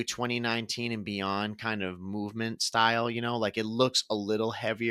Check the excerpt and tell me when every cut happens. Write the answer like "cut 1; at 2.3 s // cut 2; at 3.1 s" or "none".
none